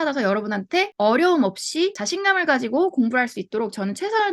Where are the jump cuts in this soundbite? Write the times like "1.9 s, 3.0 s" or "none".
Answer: 0.9 s, 2.0 s